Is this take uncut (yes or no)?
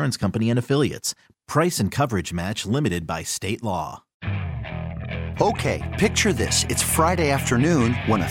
no